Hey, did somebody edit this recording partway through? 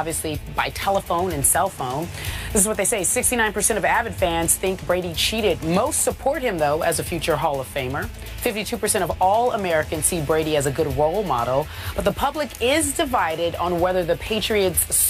yes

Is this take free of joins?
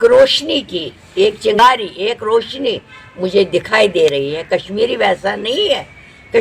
no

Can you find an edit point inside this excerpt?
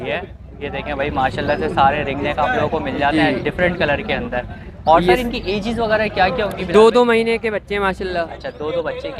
no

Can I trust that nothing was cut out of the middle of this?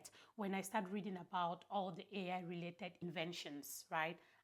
no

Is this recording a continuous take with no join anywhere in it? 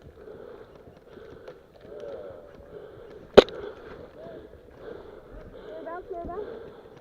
no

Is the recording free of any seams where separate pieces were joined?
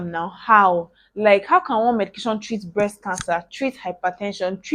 yes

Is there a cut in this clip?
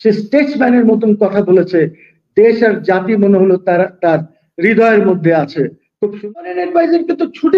yes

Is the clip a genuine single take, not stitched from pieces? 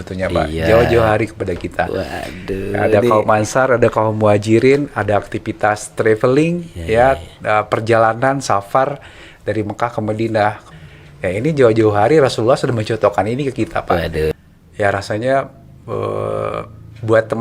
no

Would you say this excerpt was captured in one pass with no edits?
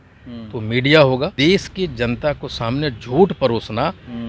no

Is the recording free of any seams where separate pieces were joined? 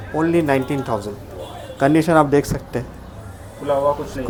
yes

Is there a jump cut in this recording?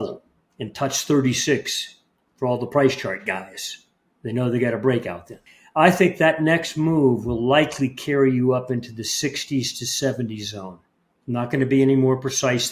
no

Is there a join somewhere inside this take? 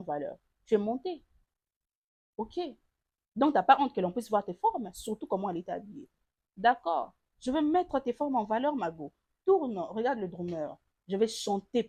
no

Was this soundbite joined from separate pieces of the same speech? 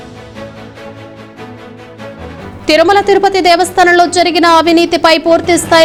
no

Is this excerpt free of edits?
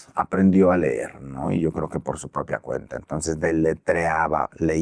yes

